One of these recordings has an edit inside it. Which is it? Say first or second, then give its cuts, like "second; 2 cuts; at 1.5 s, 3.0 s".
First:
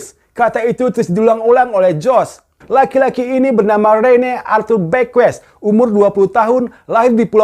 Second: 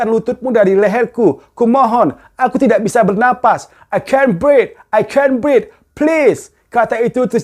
first; 1 cut; at 2.5 s